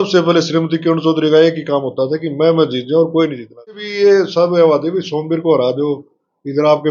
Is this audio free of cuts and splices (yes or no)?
no